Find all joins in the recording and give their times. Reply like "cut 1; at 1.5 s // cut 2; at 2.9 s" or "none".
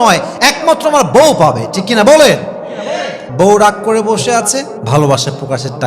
cut 1; at 3.2 s